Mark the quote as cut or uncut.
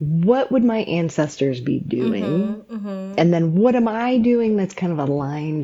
cut